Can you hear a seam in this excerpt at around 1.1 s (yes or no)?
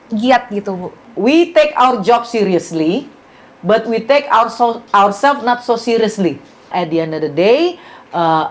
yes